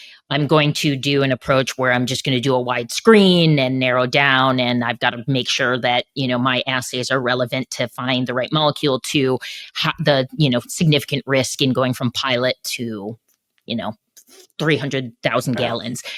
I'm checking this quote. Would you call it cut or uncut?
uncut